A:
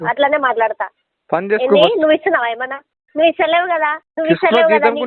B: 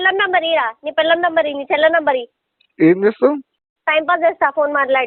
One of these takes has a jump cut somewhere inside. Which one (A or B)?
A